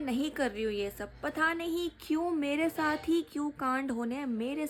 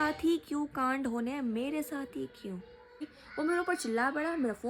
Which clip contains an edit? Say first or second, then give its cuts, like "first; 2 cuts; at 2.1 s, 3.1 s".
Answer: second; 1 cut; at 3.2 s